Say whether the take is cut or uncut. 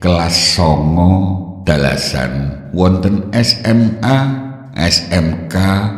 cut